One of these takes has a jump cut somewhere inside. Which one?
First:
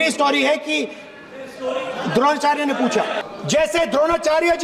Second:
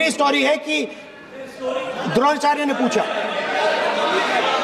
first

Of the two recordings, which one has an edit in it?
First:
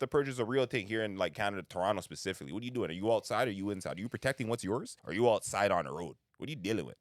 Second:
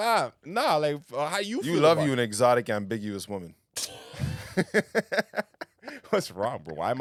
first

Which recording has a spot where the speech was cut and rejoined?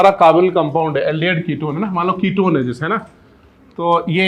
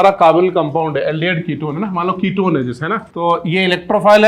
second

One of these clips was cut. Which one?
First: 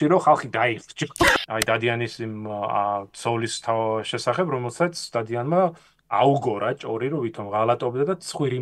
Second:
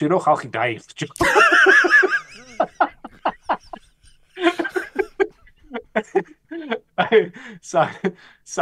first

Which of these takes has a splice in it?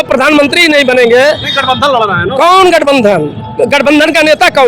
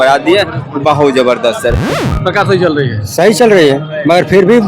second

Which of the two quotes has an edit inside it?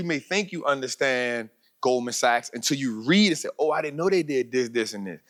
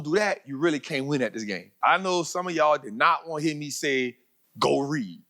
second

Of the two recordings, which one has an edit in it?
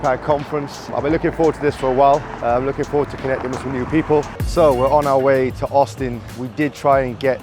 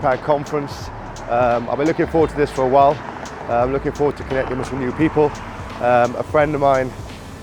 first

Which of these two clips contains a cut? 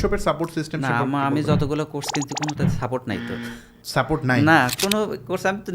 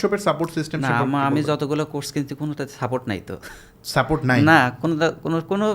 first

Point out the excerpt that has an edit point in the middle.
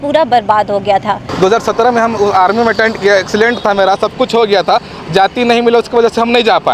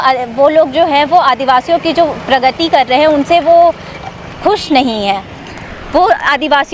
first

